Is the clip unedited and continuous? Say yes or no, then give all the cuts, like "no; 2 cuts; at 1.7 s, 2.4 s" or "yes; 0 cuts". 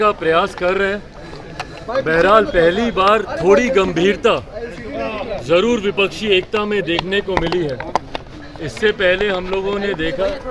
yes; 0 cuts